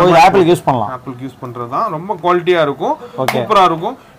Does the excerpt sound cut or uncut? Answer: uncut